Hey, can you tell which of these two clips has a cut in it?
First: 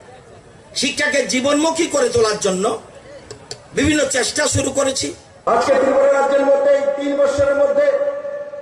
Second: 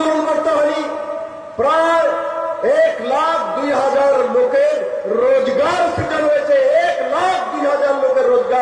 first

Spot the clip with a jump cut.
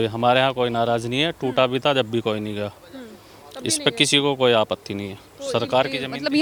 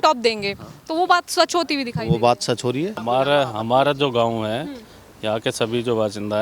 second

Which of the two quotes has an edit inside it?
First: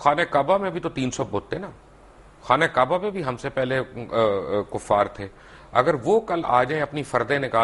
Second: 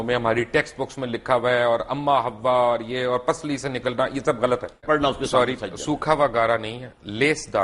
second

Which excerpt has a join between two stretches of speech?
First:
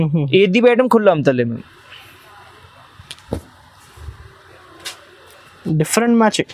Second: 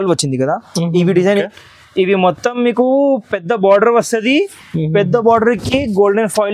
second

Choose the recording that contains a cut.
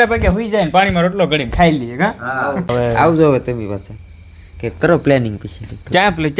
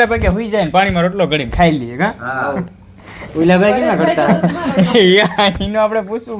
first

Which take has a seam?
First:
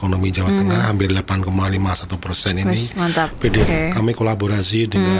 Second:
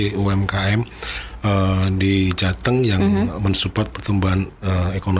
first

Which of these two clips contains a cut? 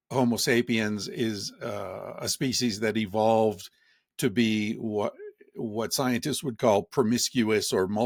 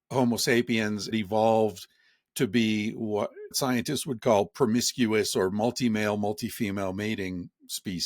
second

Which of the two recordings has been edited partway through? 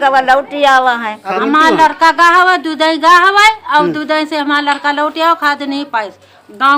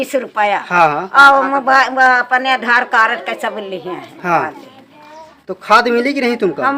first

